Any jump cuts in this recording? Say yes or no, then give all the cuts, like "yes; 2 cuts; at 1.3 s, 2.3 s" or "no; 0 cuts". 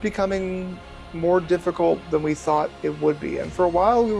no; 0 cuts